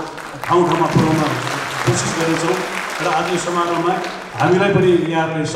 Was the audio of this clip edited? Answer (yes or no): no